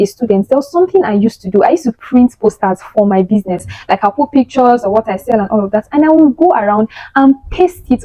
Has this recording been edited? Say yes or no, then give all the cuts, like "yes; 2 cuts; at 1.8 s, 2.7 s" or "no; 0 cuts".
no; 0 cuts